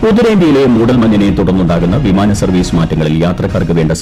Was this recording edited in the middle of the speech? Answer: no; 0 cuts

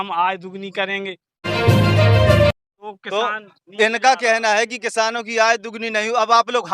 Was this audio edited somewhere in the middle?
yes; 2 cuts; at 1.3 s, 3.0 s

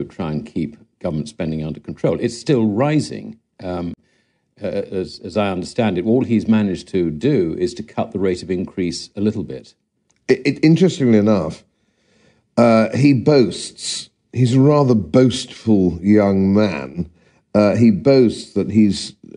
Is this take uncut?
yes; 0 cuts

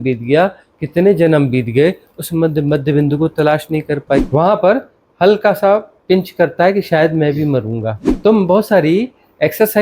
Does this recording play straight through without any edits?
no; 2 cuts; at 4.3 s, 8.0 s

